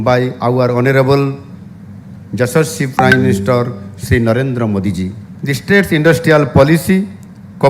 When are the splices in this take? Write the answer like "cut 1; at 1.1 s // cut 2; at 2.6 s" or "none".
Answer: cut 1; at 5.3 s